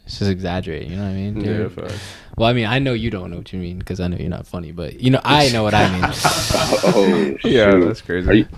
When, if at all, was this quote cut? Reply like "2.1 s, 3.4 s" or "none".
none